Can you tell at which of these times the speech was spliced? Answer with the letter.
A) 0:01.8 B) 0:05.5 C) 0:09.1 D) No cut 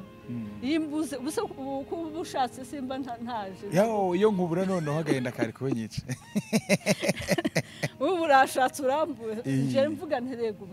D